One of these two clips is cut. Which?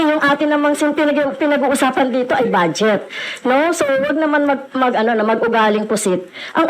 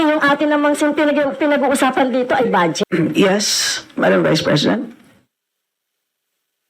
second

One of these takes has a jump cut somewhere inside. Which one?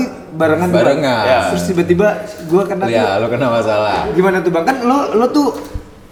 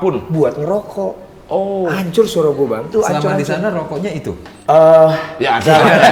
second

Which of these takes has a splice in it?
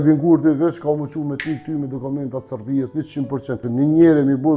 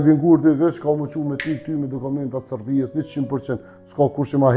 first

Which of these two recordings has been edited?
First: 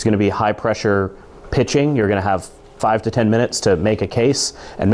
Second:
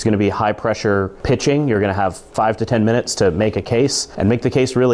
second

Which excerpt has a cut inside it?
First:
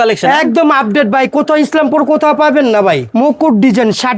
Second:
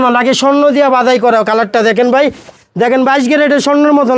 first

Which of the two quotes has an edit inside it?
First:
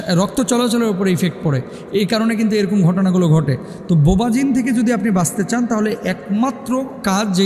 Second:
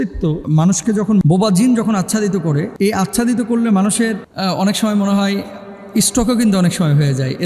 second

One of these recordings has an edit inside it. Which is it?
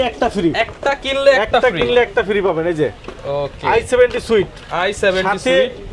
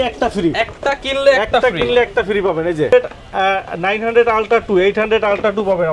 second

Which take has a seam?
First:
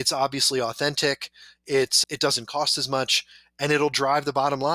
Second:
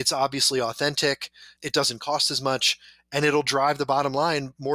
second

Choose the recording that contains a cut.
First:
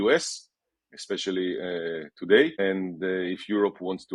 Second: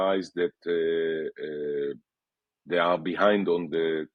first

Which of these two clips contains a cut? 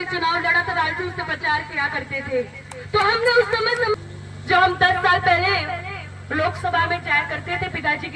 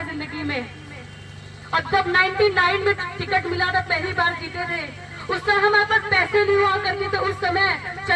first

